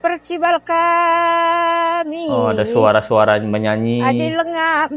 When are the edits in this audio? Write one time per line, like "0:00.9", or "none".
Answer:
none